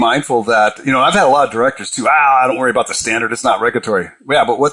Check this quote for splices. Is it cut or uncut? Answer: uncut